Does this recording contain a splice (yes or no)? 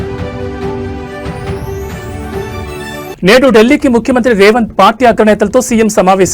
no